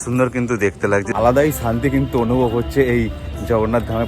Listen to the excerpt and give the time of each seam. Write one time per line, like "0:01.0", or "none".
0:01.1